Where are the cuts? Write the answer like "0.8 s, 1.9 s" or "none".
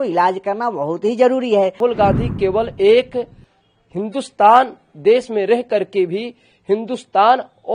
1.8 s